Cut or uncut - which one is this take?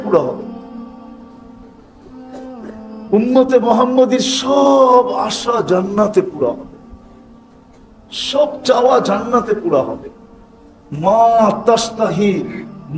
uncut